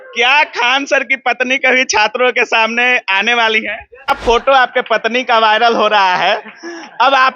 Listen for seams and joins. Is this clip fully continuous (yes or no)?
no